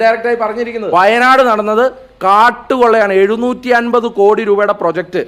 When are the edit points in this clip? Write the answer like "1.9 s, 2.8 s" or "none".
0.9 s